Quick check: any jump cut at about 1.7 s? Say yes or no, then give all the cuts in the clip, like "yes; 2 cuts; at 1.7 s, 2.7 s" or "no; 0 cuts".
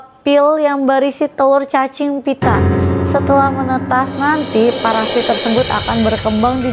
no; 0 cuts